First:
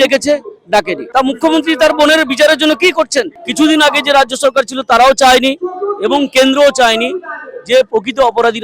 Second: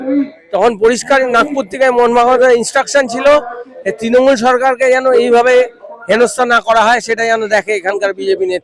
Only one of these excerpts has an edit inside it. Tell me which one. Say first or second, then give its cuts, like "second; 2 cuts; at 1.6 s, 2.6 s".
first; 2 cuts; at 1.0 s, 3.3 s